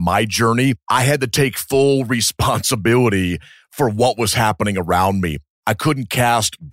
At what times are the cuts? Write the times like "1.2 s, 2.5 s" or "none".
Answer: 0.8 s, 5.5 s